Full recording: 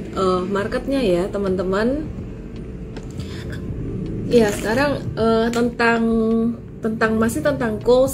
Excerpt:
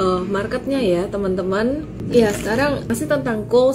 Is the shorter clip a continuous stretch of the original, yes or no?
no